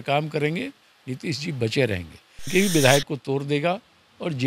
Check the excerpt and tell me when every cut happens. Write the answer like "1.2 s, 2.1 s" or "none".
2.5 s